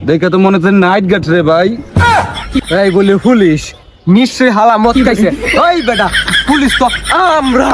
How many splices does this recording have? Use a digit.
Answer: 1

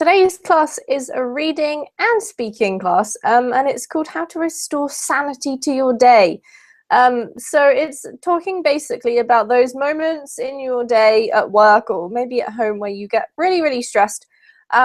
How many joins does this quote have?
0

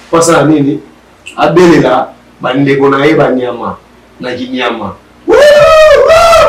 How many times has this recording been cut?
0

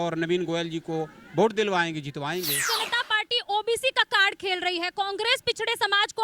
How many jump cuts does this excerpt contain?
1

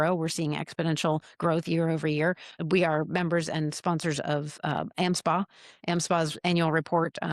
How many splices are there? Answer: 1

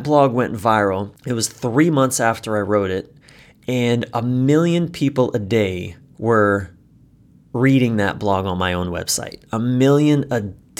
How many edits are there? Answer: 1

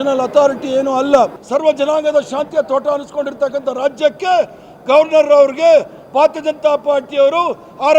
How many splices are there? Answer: 1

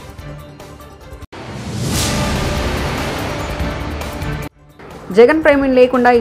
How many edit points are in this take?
2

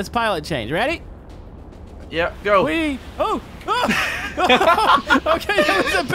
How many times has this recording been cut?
0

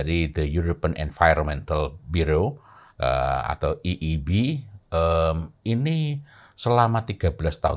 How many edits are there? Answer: 0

